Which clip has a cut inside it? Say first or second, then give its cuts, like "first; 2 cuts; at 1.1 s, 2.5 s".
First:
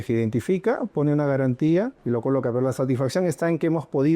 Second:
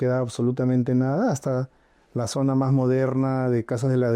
first; 1 cut; at 2.0 s